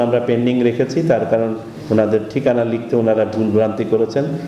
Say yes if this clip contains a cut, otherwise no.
no